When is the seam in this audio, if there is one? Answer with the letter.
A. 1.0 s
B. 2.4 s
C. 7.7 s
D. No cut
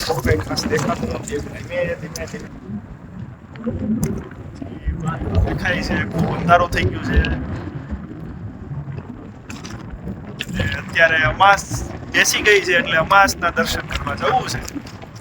B